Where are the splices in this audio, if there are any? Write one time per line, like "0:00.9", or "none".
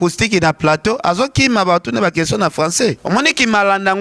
0:03.0